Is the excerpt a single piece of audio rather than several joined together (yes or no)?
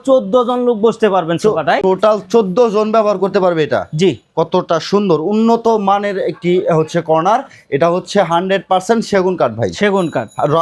yes